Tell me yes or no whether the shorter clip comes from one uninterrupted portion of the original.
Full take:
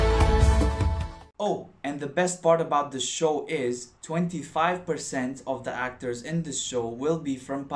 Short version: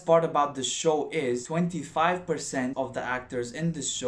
no